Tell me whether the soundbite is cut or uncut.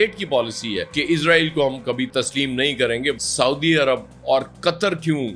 cut